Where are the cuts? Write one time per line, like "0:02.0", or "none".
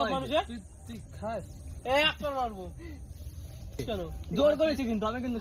0:03.8